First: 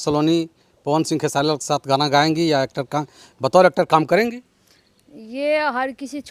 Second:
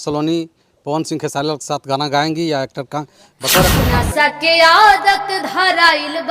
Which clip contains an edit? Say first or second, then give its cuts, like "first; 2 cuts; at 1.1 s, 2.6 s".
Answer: second; 1 cut; at 3.7 s